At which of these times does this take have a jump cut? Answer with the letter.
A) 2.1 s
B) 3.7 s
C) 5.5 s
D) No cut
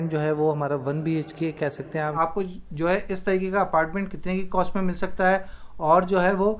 A